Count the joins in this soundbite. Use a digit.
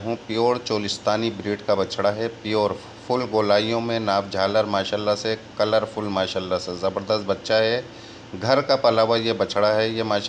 0